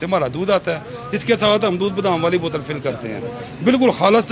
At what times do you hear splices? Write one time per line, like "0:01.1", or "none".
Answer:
none